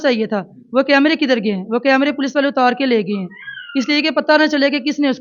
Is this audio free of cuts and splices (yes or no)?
yes